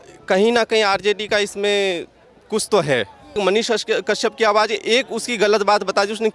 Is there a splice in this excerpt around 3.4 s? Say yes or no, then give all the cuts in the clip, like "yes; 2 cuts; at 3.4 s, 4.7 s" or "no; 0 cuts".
yes; 1 cut; at 3.4 s